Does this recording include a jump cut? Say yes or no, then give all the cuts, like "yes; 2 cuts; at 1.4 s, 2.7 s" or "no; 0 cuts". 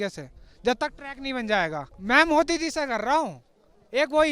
yes; 1 cut; at 1.9 s